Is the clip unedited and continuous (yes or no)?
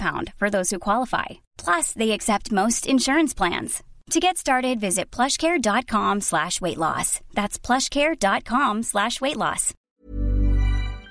no